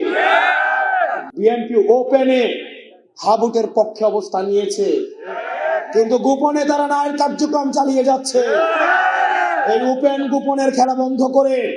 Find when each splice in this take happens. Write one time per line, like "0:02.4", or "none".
0:01.3